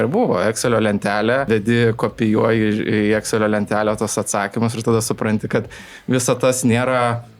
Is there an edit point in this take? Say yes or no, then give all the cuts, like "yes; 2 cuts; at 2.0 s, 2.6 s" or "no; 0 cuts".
yes; 1 cut; at 1.5 s